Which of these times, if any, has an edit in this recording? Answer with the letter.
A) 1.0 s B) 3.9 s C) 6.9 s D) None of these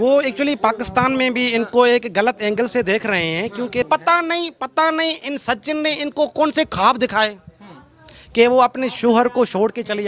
B